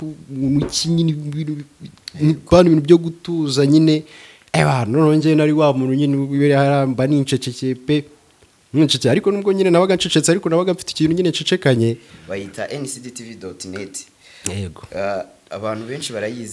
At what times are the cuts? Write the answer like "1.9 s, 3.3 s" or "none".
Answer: 12.1 s